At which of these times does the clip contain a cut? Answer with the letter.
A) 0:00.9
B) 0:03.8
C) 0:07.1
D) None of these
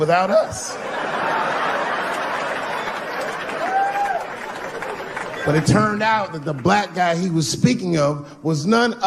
C